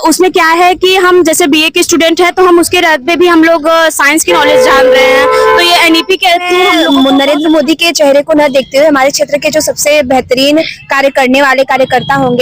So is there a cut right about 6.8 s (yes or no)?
yes